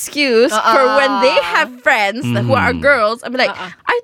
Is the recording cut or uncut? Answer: uncut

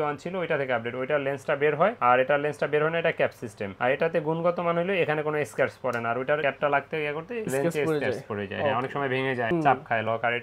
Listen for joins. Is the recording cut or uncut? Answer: uncut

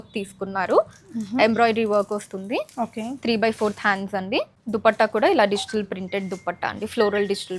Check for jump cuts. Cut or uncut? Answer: cut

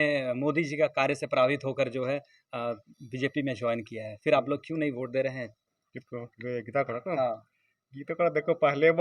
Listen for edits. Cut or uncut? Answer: uncut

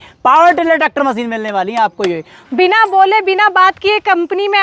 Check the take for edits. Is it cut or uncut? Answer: cut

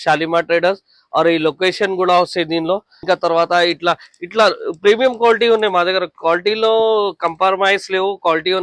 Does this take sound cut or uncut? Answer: cut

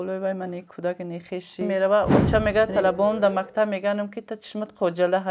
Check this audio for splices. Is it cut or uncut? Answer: cut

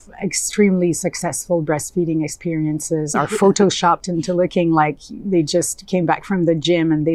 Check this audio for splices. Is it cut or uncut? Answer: uncut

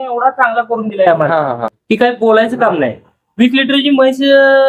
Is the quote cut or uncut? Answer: uncut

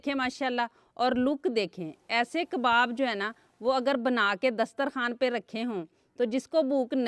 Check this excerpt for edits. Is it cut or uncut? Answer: uncut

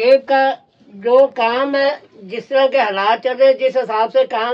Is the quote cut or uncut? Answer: uncut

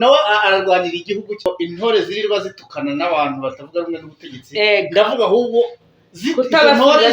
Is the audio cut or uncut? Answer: cut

